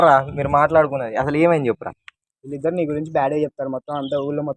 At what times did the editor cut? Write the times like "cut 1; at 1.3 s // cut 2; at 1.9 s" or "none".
none

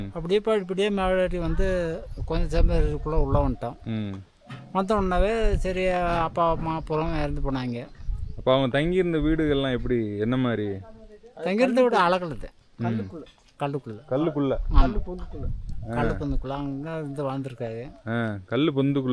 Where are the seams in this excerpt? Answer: none

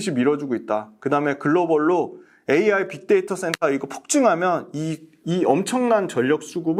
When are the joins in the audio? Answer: none

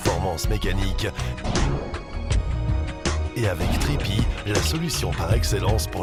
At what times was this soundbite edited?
none

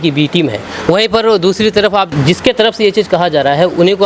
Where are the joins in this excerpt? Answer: cut 1; at 2.1 s

